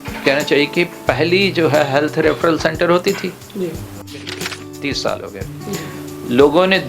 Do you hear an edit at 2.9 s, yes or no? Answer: no